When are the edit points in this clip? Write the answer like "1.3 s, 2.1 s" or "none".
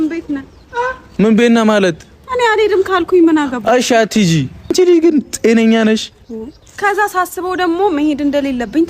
1.0 s, 4.6 s, 6.8 s